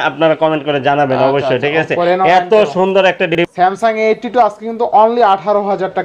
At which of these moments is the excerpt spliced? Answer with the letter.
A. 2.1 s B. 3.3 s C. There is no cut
B